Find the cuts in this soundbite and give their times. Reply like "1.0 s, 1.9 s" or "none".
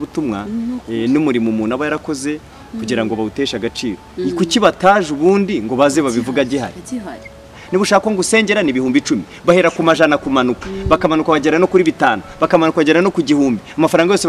7.5 s